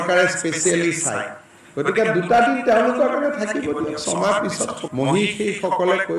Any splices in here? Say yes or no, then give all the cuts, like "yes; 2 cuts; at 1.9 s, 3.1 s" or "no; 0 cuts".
yes; 1 cut; at 4.8 s